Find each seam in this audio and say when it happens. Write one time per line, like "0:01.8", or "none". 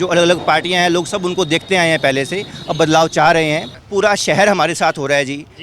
0:03.8